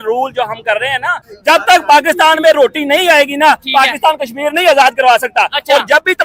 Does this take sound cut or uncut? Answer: cut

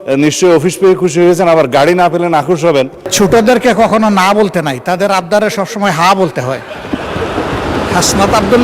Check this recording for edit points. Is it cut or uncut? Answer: cut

